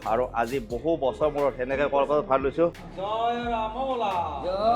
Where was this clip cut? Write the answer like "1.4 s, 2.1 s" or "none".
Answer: 2.9 s